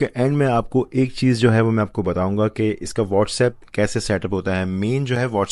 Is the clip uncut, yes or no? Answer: yes